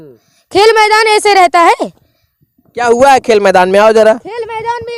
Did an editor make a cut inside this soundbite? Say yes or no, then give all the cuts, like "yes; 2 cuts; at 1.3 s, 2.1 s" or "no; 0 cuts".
no; 0 cuts